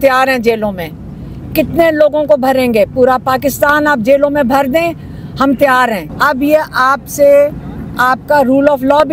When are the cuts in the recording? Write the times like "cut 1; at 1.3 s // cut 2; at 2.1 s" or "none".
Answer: cut 1; at 6.1 s